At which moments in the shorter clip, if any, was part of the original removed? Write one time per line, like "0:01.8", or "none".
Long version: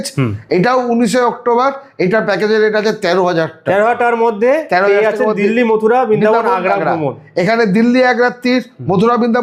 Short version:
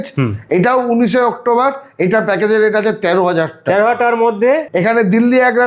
0:04.6